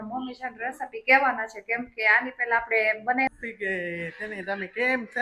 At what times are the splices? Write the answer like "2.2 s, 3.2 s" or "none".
3.3 s